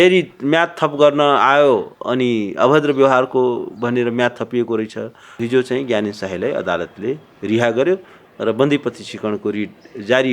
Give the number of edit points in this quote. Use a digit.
1